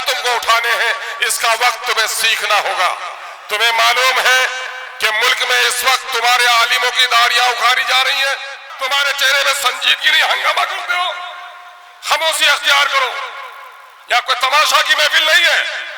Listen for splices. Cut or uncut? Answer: cut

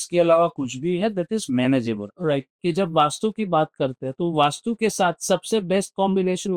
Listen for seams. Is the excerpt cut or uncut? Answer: cut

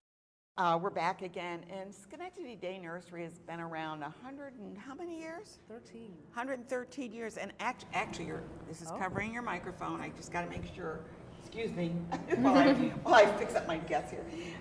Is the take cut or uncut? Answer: uncut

